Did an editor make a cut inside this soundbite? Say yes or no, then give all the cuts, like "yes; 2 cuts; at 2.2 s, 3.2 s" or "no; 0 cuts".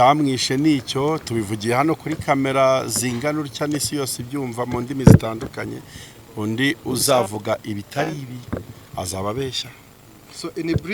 no; 0 cuts